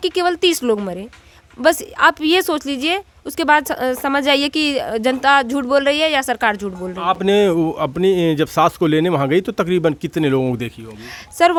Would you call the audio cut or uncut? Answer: uncut